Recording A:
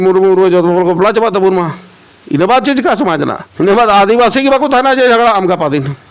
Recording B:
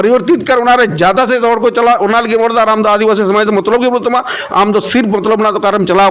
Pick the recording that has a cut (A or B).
A